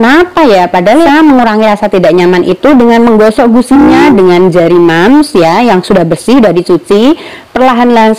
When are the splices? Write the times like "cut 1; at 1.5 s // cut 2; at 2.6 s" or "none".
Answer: cut 1; at 1.1 s